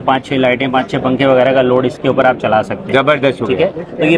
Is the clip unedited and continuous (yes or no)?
yes